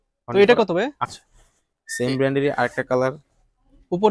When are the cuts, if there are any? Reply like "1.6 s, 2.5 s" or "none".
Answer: 1.0 s